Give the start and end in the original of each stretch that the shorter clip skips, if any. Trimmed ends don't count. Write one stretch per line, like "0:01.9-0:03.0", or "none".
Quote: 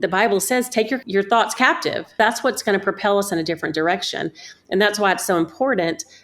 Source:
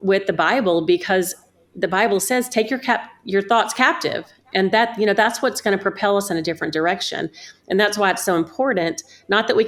0:02.8-0:03.2
0:04.4-0:05.2